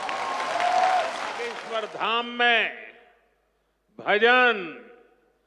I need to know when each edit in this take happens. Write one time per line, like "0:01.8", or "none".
0:01.6